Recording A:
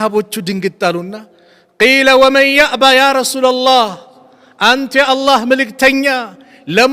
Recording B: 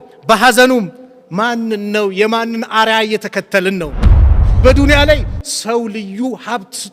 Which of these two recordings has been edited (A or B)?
B